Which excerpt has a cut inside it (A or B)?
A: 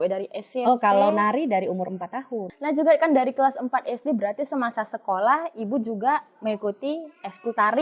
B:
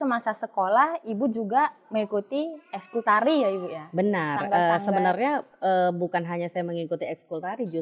A